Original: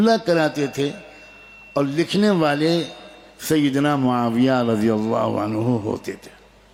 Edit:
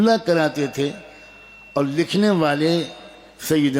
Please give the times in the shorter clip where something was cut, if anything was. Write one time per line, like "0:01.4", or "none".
none

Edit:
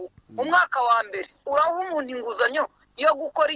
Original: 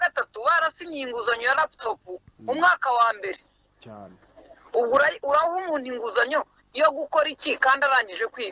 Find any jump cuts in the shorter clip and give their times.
0:01.4

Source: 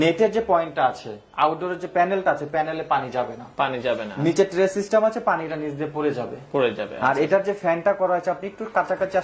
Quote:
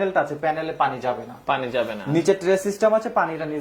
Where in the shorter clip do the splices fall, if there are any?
none

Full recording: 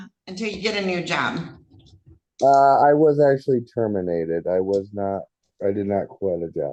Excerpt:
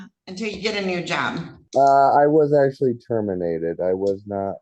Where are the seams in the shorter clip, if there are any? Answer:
0:01.6

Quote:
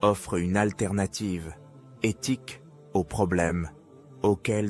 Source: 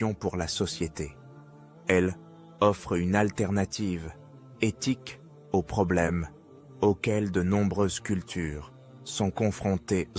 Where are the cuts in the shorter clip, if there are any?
none

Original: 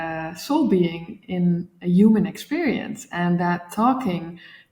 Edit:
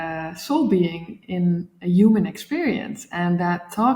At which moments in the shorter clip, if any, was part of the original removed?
none

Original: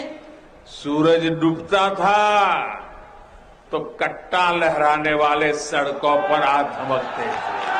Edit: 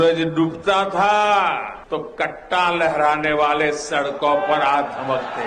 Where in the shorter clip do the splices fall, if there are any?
0:01.7

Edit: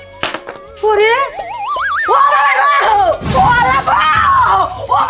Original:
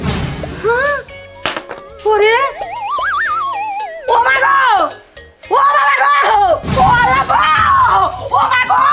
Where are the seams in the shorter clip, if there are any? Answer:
0:01.9

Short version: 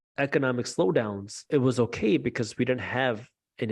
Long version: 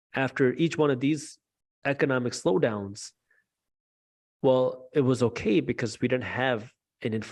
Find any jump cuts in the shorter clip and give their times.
0:01.4

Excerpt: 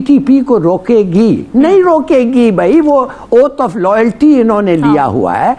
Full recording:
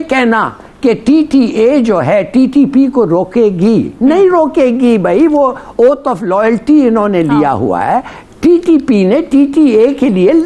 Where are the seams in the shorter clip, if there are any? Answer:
none

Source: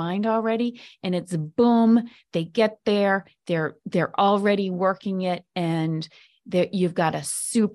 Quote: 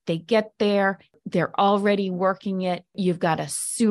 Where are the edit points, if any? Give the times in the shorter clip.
0:01.1
0:02.9

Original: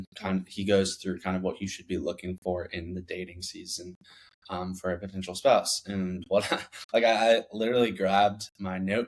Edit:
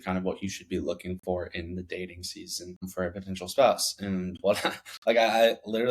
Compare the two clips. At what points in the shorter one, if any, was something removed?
0:02.8

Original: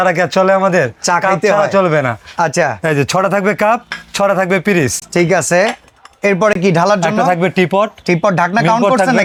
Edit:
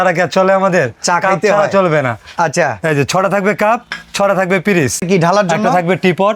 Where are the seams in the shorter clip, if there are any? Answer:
0:05.0

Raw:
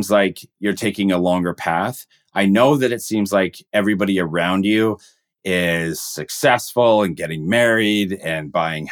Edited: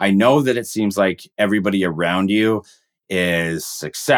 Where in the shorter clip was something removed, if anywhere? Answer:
none

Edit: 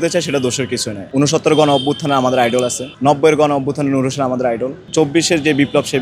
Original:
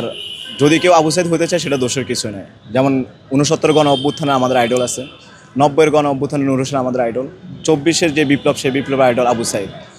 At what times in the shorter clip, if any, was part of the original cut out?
0:01.0
0:02.8
0:04.8

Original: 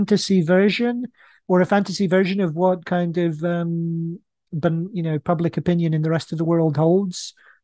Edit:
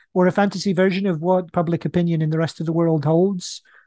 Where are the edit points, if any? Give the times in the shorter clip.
0:01.5

